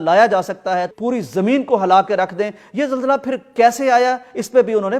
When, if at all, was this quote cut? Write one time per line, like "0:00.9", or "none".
0:00.9